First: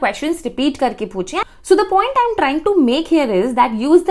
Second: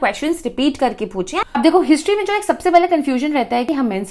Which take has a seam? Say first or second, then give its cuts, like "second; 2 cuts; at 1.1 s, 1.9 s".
second; 1 cut; at 1.6 s